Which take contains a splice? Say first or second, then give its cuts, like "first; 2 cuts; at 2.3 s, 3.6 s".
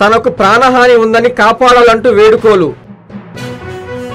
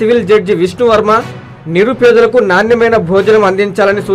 first; 1 cut; at 2.8 s